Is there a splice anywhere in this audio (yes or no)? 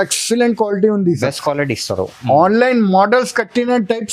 no